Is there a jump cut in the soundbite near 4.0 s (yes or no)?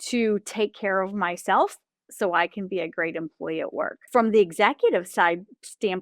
yes